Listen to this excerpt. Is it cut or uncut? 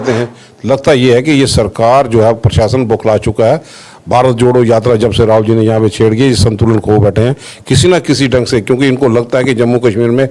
uncut